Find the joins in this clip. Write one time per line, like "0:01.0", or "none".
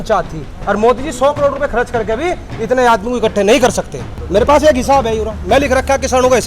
0:04.1